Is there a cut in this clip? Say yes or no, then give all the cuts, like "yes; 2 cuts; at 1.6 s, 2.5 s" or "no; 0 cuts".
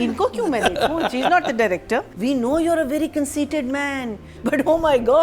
yes; 2 cuts; at 2.1 s, 4.2 s